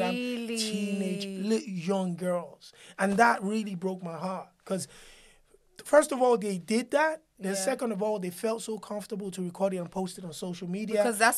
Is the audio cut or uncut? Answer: uncut